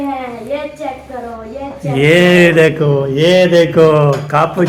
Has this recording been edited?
no; 0 cuts

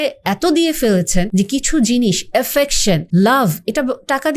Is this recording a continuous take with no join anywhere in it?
no; 2 cuts; at 1.3 s, 3.0 s

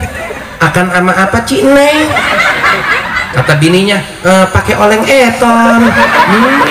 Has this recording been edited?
no; 0 cuts

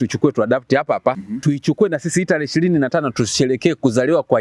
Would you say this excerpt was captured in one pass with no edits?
no; 1 cut; at 1.3 s

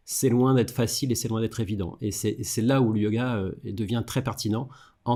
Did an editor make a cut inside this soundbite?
no; 0 cuts

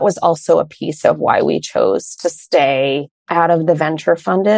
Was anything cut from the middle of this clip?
no; 0 cuts

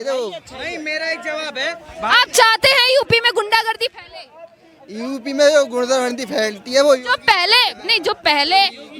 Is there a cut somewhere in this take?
no; 0 cuts

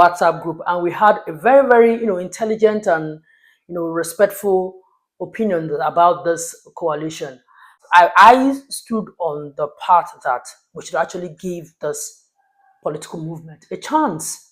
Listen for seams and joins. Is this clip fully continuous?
no; 1 cut; at 7.8 s

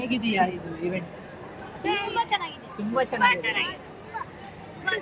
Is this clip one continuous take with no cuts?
yes; 0 cuts

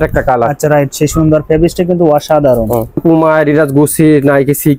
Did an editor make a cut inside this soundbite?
yes; 1 cut; at 3.0 s

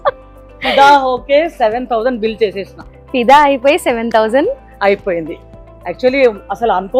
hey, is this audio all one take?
yes; 0 cuts

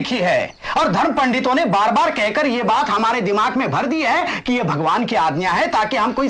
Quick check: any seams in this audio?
no; 0 cuts

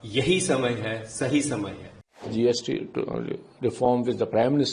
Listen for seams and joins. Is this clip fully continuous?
no; 1 cut; at 2.3 s

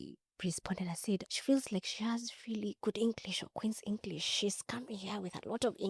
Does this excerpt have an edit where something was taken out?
yes; 1 cut; at 1.3 s

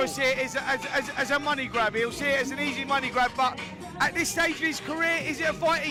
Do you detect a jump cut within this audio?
no; 0 cuts

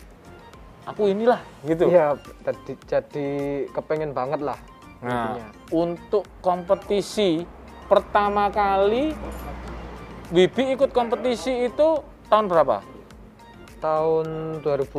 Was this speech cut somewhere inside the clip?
no; 0 cuts

